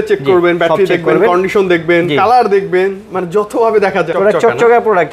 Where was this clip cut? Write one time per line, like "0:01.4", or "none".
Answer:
0:04.1